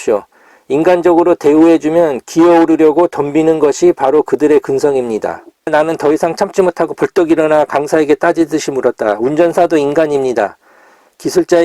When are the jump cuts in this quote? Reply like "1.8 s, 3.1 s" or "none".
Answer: 5.7 s